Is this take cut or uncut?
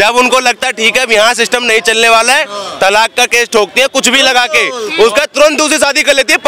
uncut